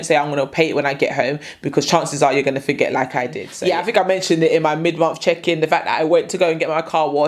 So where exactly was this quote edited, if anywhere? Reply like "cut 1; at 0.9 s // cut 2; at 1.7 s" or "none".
cut 1; at 3.4 s